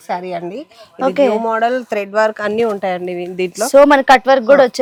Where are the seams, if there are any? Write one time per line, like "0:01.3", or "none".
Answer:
none